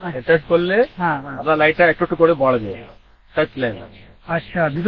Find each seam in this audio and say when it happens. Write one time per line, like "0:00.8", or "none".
none